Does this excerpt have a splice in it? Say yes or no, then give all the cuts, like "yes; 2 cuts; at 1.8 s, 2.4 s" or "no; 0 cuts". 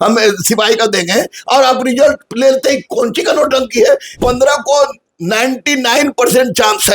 yes; 1 cut; at 4.2 s